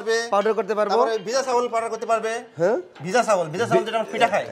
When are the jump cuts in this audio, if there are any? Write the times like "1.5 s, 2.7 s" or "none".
none